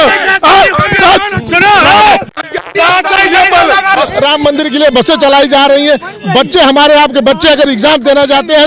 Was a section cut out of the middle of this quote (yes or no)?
yes